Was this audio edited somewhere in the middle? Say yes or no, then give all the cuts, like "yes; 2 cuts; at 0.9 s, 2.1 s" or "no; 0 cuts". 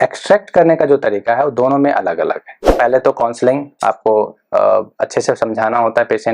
yes; 1 cut; at 2.6 s